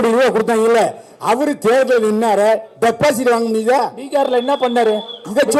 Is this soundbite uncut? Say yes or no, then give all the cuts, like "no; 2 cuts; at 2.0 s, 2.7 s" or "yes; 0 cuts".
yes; 0 cuts